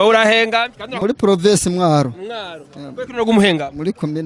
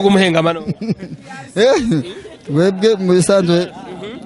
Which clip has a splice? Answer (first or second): first